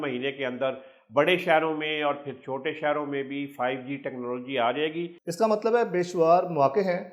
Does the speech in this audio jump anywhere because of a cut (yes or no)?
yes